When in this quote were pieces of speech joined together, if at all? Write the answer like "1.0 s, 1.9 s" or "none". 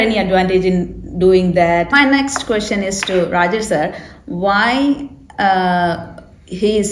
1.9 s